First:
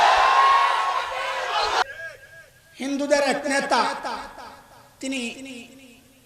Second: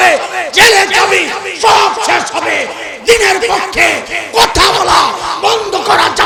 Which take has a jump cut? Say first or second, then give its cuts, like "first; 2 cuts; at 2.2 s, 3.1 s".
first; 1 cut; at 1.8 s